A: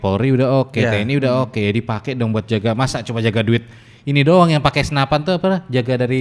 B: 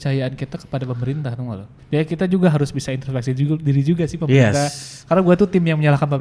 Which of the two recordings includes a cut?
B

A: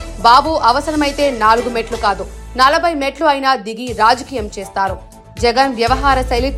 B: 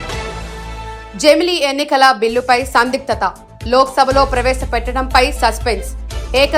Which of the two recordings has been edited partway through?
B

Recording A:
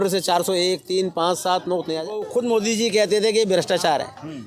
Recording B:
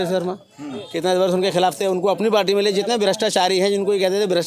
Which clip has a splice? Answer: A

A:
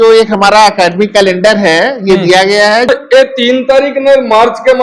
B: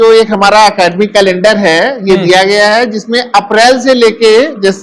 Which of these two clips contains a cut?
A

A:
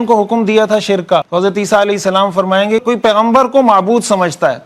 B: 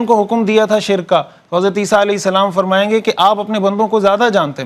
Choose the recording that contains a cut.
A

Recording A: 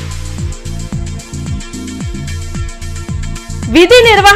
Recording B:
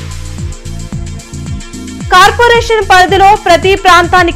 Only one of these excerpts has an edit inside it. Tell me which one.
B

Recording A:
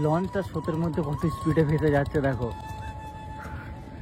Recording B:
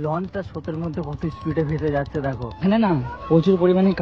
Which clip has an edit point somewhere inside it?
B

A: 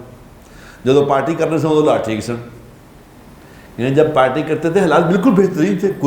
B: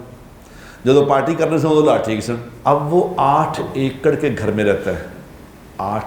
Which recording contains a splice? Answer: B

